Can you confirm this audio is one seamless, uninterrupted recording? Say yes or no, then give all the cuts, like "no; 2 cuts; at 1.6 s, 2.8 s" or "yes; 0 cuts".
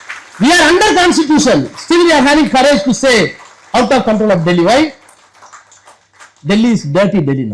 yes; 0 cuts